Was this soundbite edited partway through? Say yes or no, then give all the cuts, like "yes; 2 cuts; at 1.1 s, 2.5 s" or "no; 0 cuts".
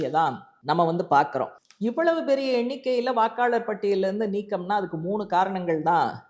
yes; 1 cut; at 1.6 s